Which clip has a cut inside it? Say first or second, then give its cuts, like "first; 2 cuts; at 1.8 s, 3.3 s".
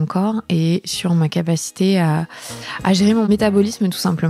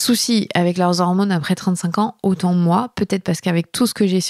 first; 1 cut; at 3.3 s